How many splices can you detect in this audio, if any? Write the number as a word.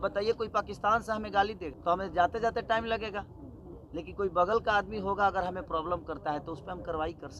one